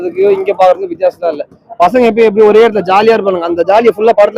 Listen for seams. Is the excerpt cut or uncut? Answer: uncut